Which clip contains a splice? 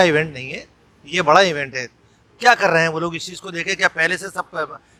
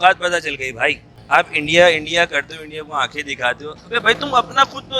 second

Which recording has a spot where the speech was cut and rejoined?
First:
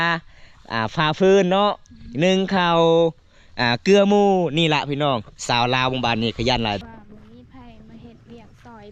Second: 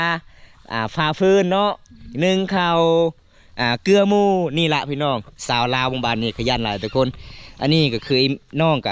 first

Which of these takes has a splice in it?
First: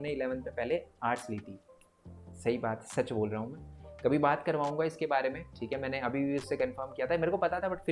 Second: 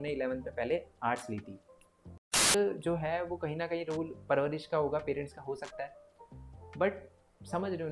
second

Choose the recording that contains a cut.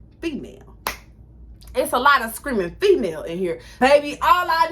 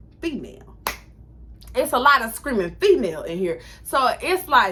first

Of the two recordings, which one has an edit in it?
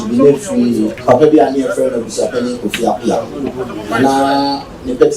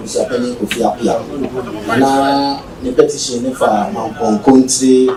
first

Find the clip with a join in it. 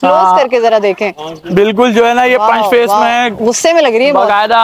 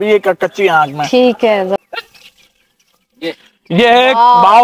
second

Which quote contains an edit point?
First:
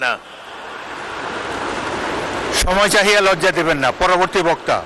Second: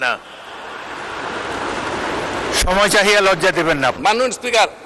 second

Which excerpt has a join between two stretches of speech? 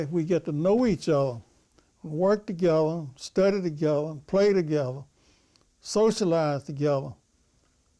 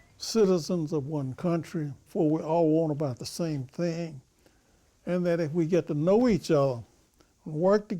second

